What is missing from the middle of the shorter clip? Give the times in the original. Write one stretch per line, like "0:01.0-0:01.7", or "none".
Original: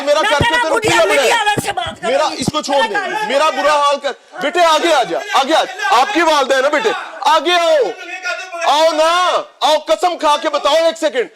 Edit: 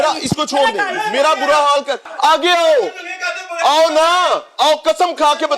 0:04.2-0:07.1